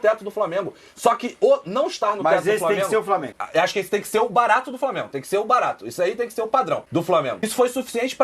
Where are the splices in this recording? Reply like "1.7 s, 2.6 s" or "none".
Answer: 3.4 s, 7.1 s